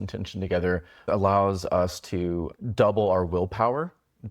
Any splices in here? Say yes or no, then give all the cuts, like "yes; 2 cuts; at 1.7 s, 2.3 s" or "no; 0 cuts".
yes; 2 cuts; at 1.0 s, 2.5 s